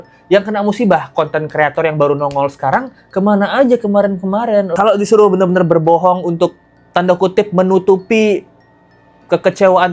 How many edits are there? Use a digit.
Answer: 1